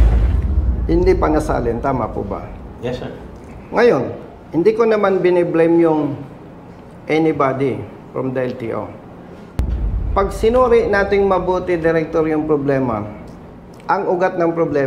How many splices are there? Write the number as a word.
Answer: one